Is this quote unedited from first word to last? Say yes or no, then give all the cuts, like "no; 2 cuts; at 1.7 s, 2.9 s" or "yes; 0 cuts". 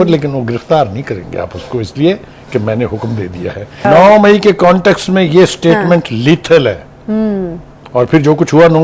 no; 1 cut; at 3.8 s